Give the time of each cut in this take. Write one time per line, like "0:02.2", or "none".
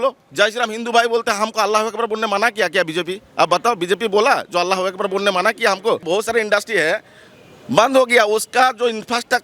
0:06.0